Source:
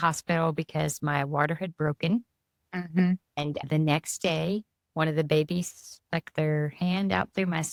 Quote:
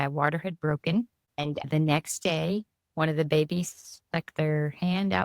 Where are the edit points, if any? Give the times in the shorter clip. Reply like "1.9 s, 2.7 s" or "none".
1.3 s